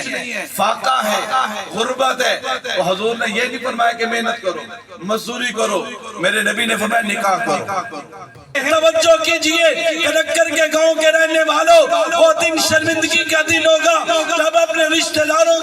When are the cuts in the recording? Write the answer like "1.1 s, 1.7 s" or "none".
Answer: 8.6 s